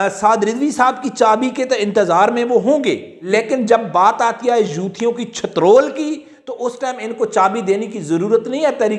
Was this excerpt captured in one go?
no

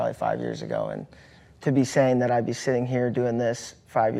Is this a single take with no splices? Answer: yes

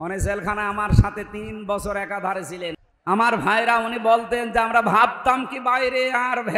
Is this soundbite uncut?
no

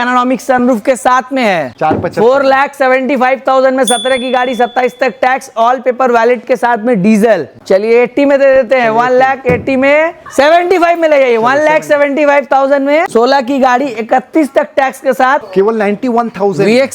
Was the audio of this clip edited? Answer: yes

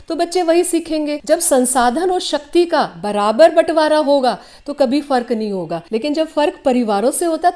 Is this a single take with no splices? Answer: no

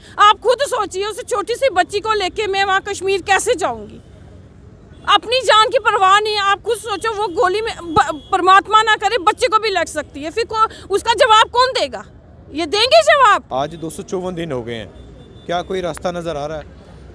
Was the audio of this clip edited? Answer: no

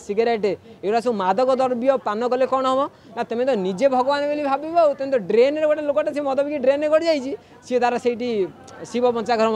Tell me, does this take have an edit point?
no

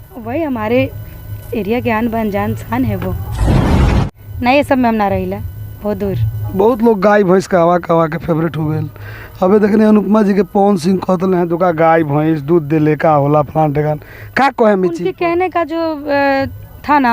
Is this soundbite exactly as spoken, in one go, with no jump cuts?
no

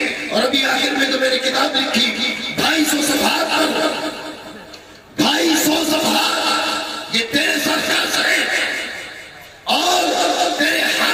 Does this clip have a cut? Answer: no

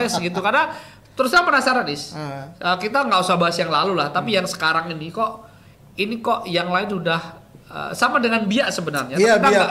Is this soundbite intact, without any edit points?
yes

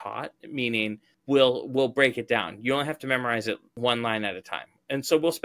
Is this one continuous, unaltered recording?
no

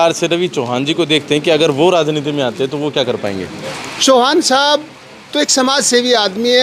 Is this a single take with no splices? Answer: no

